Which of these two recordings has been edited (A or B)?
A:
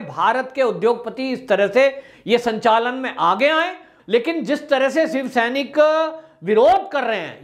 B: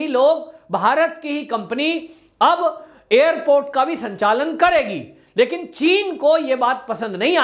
A